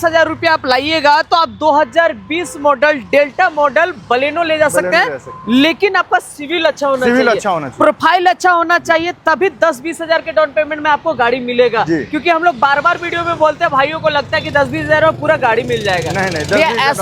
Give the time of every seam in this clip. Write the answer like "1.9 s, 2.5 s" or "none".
none